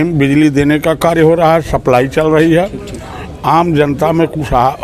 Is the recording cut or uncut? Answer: uncut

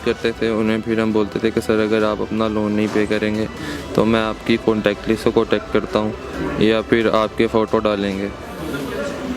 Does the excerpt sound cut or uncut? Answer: uncut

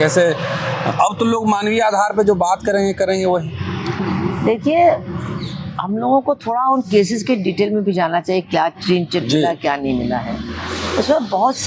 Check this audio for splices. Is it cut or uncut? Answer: uncut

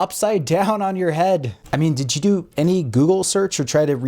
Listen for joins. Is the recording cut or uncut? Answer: cut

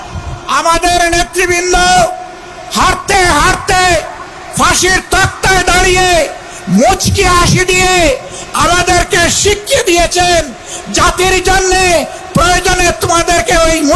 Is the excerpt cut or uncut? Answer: uncut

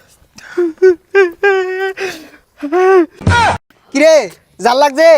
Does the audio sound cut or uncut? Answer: cut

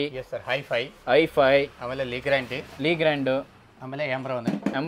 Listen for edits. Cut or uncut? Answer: uncut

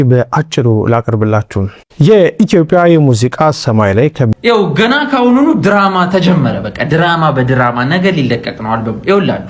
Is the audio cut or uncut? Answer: cut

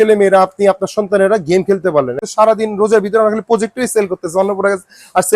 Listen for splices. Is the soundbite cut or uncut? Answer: cut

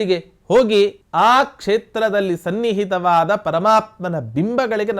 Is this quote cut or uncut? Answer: cut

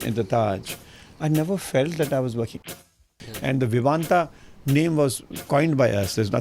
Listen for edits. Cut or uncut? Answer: cut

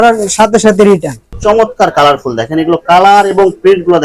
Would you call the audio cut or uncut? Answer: cut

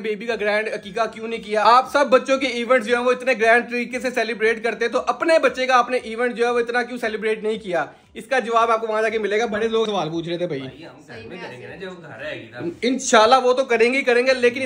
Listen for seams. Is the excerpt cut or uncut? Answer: uncut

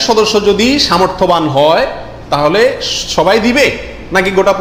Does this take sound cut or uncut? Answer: uncut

